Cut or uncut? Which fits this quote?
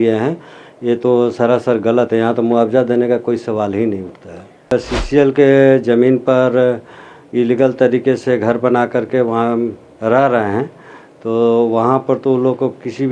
cut